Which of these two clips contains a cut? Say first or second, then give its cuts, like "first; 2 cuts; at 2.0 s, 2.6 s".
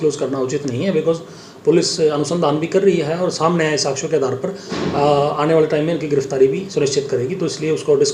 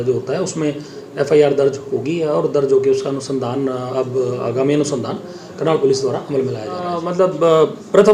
second; 1 cut; at 7.0 s